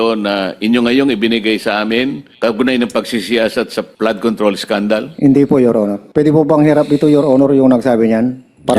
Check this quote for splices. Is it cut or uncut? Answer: cut